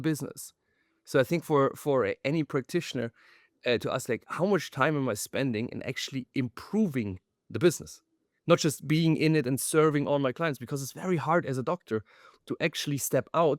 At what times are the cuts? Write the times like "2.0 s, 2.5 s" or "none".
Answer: none